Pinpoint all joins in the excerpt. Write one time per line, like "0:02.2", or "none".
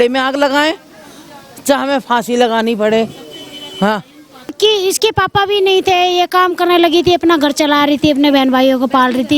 0:04.5